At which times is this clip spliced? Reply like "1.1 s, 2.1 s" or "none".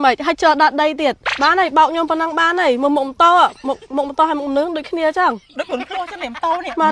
none